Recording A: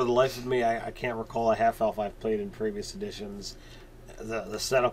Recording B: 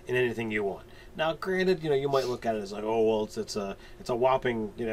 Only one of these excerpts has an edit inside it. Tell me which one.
A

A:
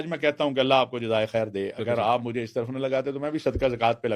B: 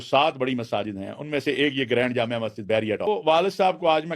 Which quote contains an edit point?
B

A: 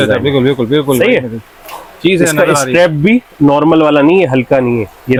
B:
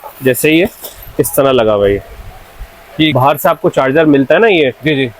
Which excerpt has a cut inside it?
B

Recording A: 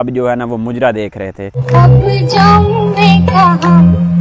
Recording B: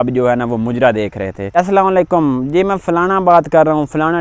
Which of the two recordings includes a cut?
B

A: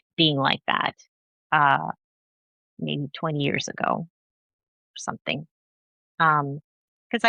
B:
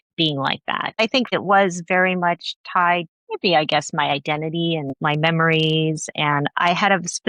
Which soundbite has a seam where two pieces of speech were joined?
B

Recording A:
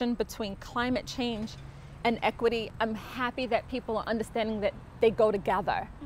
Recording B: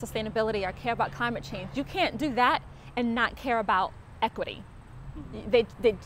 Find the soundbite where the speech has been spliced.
A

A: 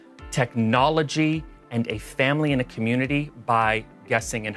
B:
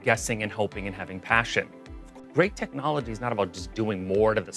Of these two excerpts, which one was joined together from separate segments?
B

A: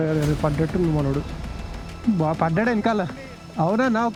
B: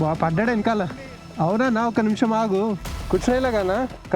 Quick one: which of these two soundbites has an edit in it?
B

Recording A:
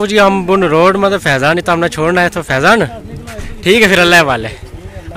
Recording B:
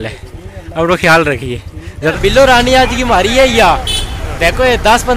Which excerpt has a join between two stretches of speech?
B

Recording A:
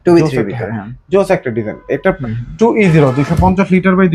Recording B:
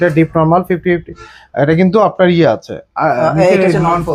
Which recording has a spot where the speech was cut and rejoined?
A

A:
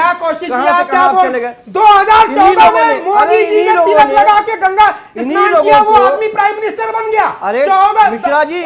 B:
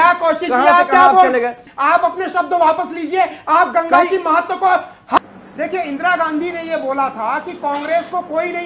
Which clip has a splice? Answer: B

